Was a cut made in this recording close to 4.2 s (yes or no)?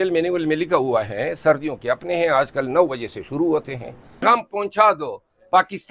yes